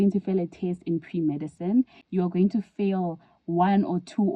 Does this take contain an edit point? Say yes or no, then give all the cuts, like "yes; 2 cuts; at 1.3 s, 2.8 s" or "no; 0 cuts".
no; 0 cuts